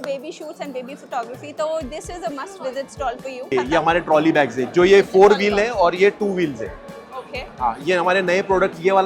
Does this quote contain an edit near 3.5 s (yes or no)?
yes